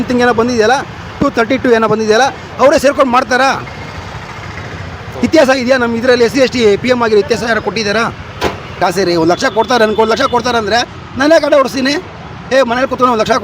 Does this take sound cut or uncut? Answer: cut